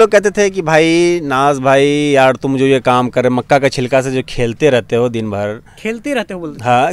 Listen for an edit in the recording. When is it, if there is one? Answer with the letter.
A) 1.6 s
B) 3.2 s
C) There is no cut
C